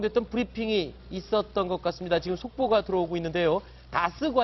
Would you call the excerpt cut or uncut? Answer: uncut